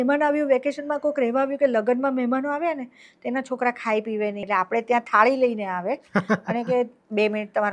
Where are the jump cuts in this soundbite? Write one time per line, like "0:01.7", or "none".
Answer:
0:04.5